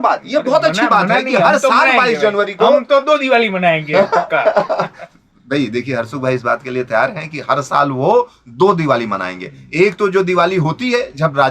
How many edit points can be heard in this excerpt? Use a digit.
0